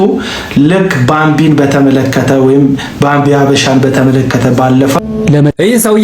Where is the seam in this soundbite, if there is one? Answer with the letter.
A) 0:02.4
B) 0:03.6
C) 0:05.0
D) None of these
C